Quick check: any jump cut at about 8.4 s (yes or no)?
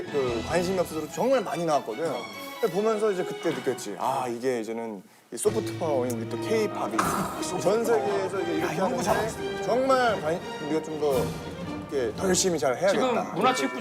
no